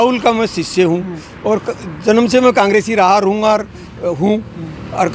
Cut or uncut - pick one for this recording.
uncut